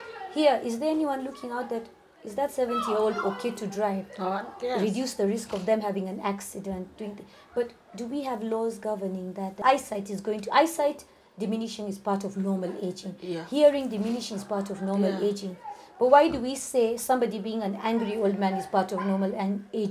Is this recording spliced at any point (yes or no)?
yes